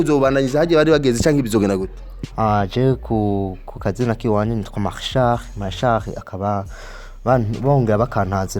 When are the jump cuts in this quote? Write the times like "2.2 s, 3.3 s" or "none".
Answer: 2.1 s